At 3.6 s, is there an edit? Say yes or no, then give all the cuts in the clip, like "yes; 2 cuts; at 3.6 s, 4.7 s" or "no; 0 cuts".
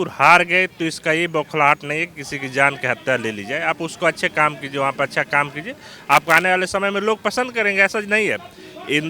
no; 0 cuts